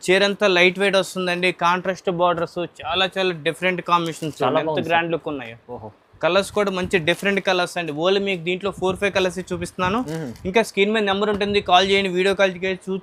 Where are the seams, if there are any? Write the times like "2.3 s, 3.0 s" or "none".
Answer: none